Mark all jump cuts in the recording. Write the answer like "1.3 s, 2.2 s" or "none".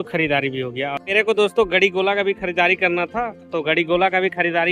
1.0 s